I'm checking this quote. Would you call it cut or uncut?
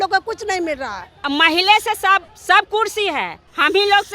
cut